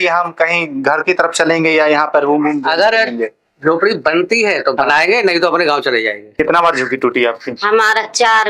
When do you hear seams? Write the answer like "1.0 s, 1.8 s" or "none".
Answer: 6.2 s

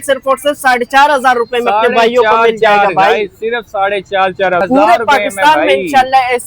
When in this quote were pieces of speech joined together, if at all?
4.6 s

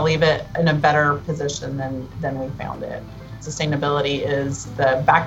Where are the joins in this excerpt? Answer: 3.3 s

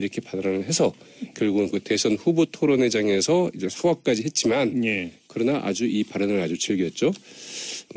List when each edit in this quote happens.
none

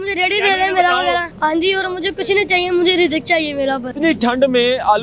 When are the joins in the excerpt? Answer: 1.3 s, 3.9 s

